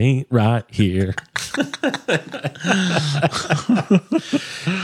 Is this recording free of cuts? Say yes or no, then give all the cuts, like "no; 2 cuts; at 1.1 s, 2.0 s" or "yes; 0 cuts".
yes; 0 cuts